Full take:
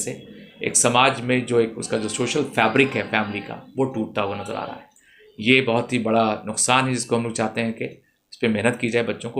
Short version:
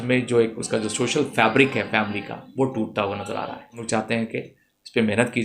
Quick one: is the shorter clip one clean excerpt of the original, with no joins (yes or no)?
no